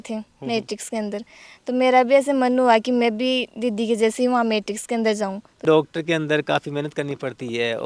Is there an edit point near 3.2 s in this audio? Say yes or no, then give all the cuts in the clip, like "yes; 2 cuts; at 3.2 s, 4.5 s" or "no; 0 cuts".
no; 1 cut; at 5.6 s